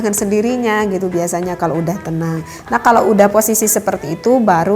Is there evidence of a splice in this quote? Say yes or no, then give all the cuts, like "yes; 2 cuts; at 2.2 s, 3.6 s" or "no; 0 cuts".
no; 0 cuts